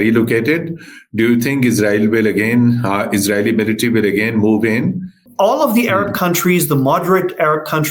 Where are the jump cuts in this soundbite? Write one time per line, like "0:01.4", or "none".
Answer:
0:05.2